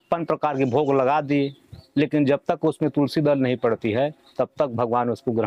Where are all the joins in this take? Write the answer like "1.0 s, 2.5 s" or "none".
none

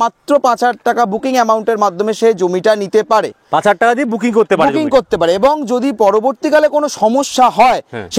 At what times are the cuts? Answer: none

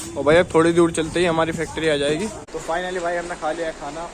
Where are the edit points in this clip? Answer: 2.5 s

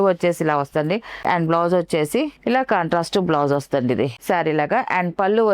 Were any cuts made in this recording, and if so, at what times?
1.2 s, 4.2 s

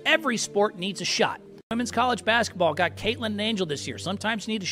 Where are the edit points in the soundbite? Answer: 1.7 s

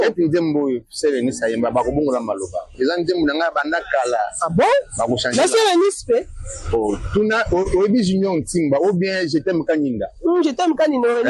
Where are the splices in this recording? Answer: none

